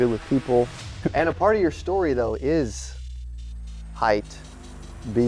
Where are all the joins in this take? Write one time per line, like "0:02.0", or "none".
0:01.0